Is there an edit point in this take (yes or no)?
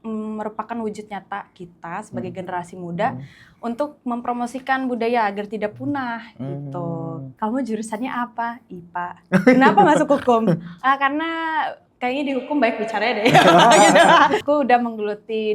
yes